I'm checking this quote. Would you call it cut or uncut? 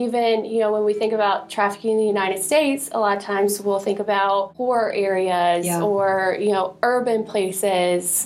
uncut